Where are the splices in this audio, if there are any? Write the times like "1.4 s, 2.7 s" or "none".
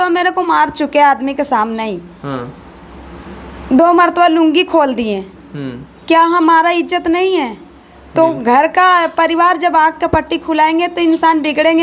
none